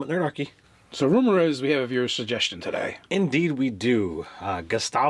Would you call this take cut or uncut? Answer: cut